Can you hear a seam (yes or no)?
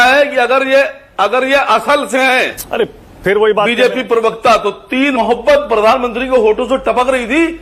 yes